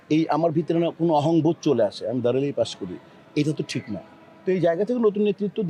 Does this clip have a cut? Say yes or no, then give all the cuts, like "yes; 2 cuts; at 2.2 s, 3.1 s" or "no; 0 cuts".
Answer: no; 0 cuts